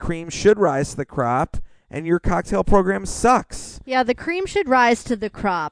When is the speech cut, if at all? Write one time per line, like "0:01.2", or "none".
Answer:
0:04.0